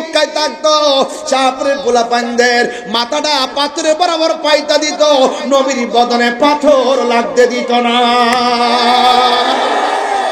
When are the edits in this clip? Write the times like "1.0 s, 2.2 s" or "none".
none

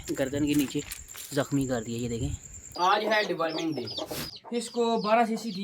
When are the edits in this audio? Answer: 2.6 s, 4.3 s

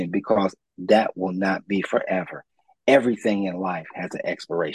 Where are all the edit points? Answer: none

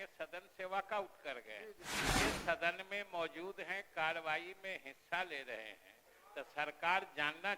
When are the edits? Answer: 1.9 s

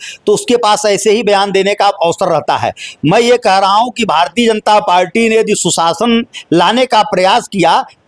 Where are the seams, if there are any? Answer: none

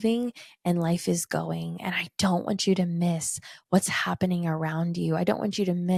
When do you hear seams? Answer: none

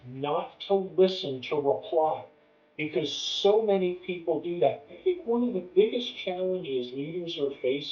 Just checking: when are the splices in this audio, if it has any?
4.9 s

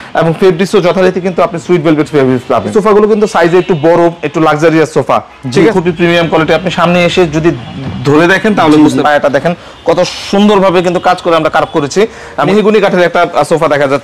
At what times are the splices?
2.7 s, 5.7 s, 9.0 s, 12.5 s

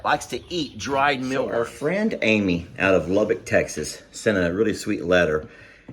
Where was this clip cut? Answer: 1.5 s

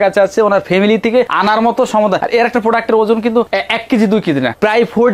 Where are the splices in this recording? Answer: none

